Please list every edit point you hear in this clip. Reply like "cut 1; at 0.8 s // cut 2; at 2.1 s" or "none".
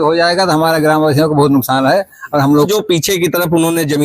cut 1; at 2.7 s